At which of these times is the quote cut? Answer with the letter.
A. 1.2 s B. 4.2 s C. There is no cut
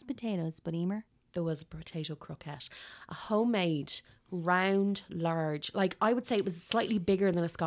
A